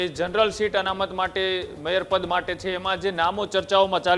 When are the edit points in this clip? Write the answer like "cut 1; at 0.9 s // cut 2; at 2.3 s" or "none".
none